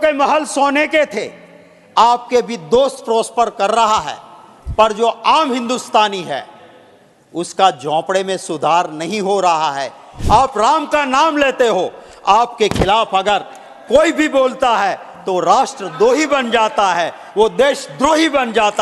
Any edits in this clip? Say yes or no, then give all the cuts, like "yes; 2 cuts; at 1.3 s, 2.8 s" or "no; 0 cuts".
yes; 1 cut; at 10.1 s